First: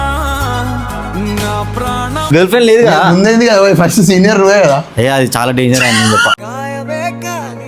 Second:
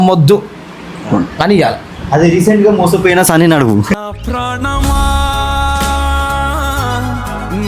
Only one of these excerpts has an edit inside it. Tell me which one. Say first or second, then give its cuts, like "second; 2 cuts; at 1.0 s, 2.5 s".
first; 1 cut; at 2.2 s